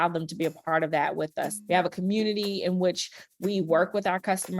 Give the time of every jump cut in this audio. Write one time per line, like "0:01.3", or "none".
0:01.6